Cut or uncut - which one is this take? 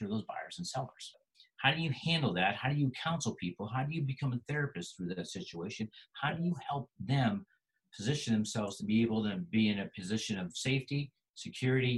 cut